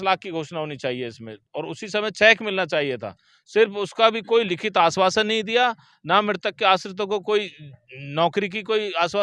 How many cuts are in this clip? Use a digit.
0